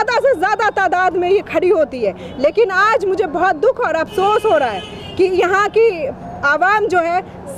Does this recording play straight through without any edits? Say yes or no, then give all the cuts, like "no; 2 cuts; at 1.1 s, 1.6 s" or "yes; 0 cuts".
yes; 0 cuts